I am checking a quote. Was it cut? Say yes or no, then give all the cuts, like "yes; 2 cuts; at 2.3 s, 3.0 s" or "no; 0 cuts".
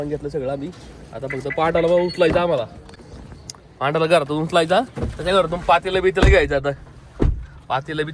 no; 0 cuts